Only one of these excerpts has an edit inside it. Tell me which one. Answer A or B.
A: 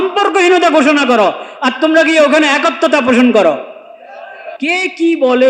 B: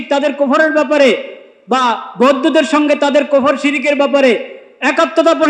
A